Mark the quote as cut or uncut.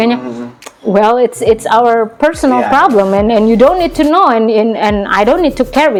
uncut